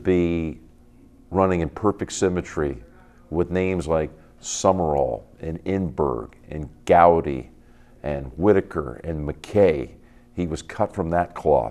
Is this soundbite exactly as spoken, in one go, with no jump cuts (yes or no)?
yes